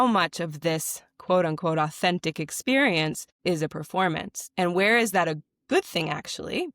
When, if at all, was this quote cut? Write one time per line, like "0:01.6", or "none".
0:03.3